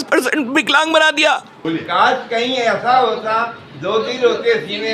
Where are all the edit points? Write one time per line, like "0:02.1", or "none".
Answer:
0:01.6